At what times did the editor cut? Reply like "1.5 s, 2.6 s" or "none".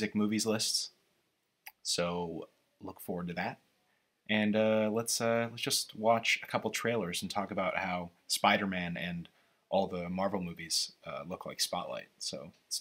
4.3 s

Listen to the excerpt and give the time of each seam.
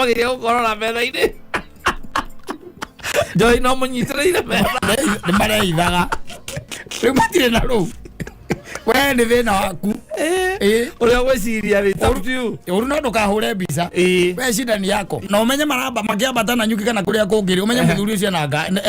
15.3 s

